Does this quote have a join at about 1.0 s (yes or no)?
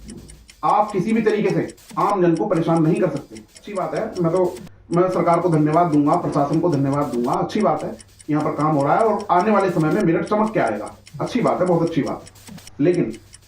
no